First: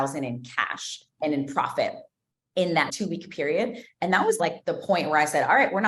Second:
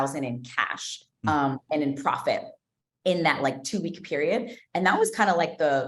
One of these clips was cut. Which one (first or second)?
first